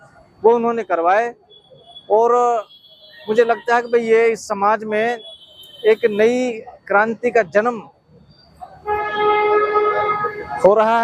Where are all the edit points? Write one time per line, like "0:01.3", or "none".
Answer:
none